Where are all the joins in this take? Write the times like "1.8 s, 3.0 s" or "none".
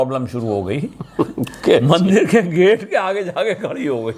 none